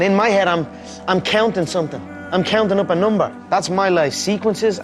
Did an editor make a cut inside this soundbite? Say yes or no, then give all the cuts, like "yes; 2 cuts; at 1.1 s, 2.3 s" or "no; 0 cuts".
yes; 1 cut; at 3.4 s